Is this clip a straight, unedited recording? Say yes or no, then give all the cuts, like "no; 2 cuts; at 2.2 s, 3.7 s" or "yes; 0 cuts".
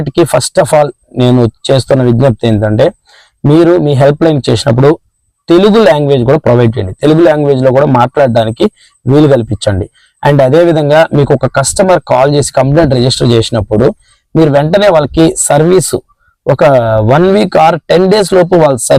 yes; 0 cuts